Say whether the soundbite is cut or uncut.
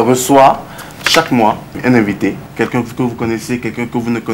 cut